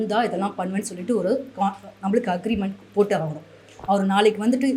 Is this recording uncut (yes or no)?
yes